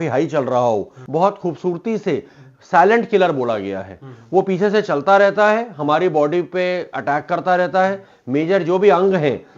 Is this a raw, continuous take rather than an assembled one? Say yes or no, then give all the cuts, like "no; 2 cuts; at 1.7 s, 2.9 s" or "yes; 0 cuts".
no; 1 cut; at 1.0 s